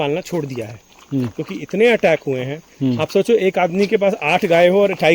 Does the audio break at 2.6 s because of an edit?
no; 0 cuts

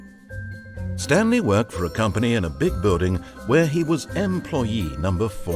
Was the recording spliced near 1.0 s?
yes; 1 cut; at 1.0 s

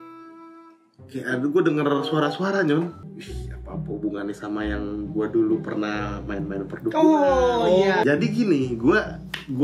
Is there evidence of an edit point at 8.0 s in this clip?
yes; 2 cuts; at 3.0 s, 8.0 s

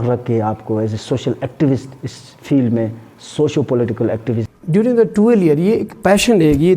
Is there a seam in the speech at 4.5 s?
yes; 1 cut; at 4.5 s

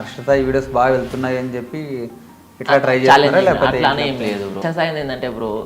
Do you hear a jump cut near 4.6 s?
yes; 1 cut; at 4.6 s

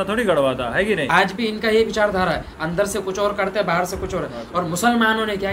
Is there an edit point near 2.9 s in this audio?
no; 1 cut; at 1.1 s

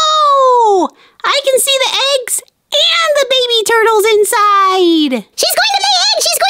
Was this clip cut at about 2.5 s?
no; 1 cut; at 5.3 s

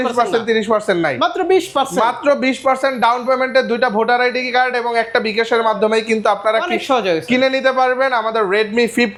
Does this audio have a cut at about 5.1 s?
no; 0 cuts

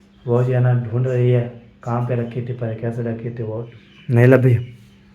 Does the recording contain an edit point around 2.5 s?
no; 1 cut; at 3.7 s

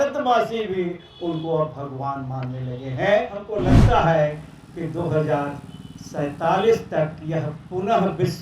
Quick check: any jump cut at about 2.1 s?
no; 1 cut; at 3.5 s

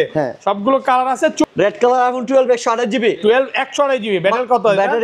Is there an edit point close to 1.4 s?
yes; 1 cut; at 1.4 s

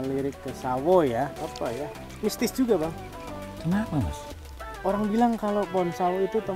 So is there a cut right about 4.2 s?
no; 1 cut; at 1.4 s

